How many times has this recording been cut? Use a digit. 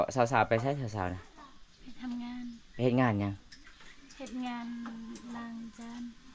0